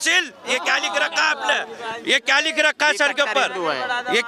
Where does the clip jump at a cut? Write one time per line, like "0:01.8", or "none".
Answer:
0:02.2